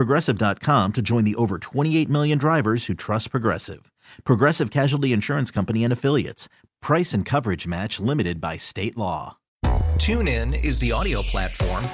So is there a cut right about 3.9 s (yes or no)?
no